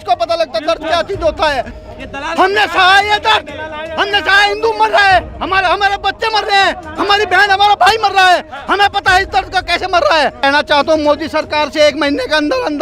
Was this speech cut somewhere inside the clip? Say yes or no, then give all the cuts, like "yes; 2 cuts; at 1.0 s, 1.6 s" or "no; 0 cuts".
yes; 1 cut; at 10.4 s